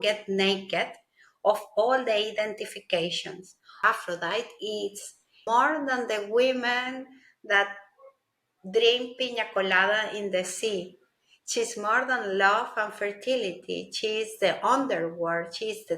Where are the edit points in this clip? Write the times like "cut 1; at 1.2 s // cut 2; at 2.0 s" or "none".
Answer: cut 1; at 3.8 s // cut 2; at 5.4 s

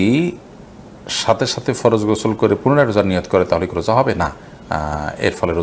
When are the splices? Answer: none

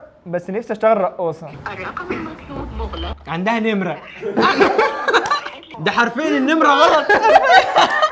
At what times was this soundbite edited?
cut 1; at 1.5 s

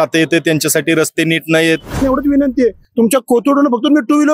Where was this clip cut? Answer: cut 1; at 2.0 s

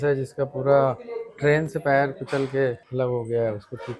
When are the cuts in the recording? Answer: cut 1; at 2.8 s

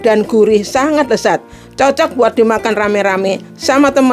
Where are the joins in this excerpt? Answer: none

